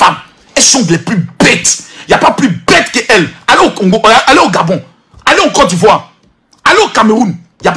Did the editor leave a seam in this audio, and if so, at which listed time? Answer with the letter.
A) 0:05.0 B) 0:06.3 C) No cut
C